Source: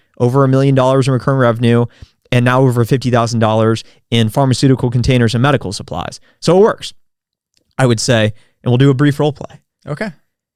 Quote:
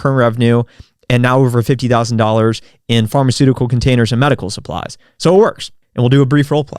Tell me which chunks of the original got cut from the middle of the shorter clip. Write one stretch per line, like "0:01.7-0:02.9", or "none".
0:07.0-0:08.5